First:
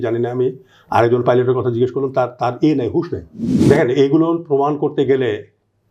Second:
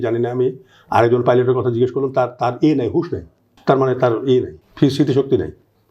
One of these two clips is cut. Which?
first; 1 cut; at 3.4 s

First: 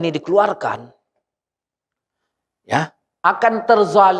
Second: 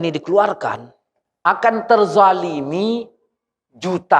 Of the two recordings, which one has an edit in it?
second; 1 cut; at 1.2 s

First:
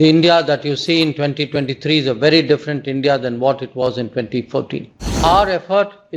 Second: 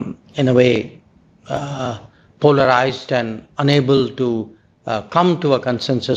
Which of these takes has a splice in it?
first; 1 cut; at 5.1 s

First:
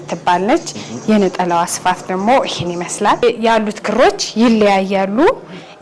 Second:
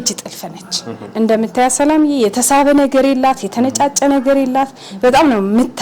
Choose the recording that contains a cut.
first; 1 cut; at 3.2 s

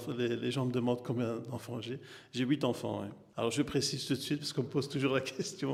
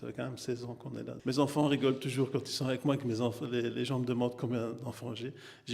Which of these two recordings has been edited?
second; 1 cut; at 1.1 s

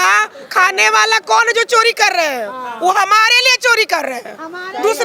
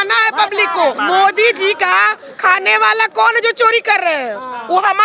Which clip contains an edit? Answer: second; 1 cut; at 1.0 s

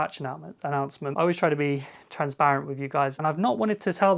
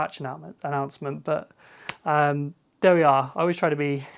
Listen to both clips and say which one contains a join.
first; 2 cuts; at 1.1 s, 3.1 s

